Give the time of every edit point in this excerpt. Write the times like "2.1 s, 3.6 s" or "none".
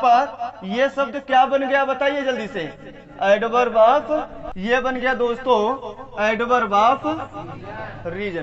4.4 s